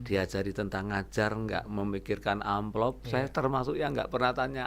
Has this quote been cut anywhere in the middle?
no; 0 cuts

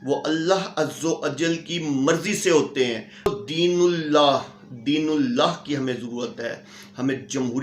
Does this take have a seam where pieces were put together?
yes; 1 cut; at 3.3 s

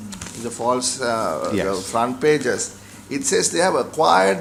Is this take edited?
no; 0 cuts

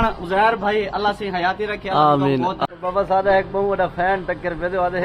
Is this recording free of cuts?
no; 1 cut; at 2.6 s

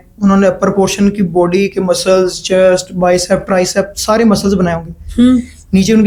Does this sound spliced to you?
no; 0 cuts

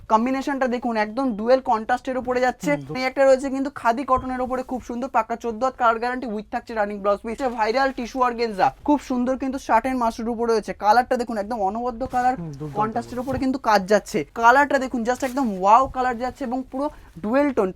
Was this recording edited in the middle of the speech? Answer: yes; 4 cuts; at 3.0 s, 7.4 s, 8.8 s, 14.3 s

